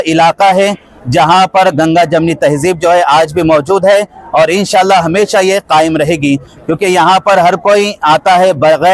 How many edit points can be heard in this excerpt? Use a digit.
0